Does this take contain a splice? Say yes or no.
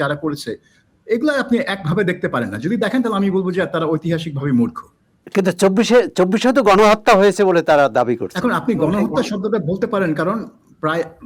no